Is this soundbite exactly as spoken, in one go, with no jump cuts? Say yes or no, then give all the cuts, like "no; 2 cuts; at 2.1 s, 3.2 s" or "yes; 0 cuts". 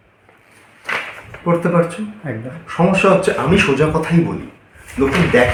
yes; 0 cuts